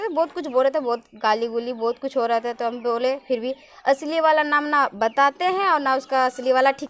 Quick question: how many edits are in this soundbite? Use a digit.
1